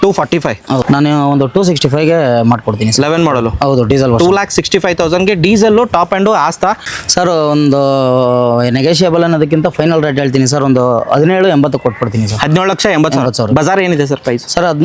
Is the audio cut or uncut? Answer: cut